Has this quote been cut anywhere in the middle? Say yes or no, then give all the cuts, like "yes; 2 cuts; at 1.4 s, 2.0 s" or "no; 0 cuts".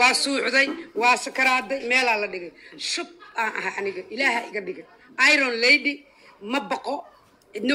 no; 0 cuts